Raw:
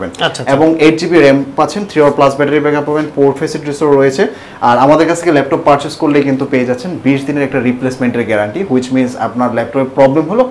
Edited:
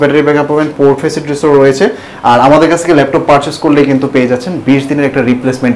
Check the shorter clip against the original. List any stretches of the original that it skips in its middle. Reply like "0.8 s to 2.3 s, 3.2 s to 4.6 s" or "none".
none